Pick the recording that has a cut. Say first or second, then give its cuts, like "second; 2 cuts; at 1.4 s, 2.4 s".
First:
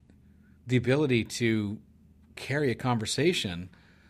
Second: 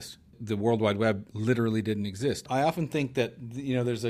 second; 1 cut; at 2.5 s